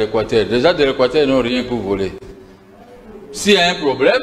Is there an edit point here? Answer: no; 0 cuts

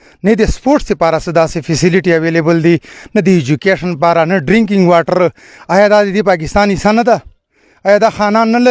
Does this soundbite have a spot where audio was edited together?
no; 0 cuts

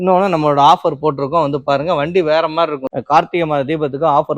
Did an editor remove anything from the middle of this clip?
yes; 1 cut; at 2.9 s

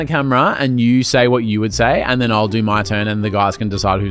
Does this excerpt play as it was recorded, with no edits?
yes; 0 cuts

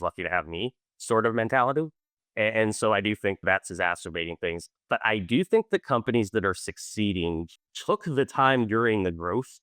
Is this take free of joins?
no; 1 cut; at 7.5 s

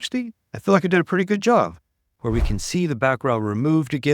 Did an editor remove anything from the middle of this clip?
yes; 1 cut; at 2.1 s

